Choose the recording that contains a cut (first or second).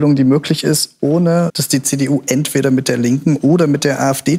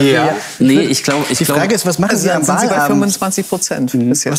second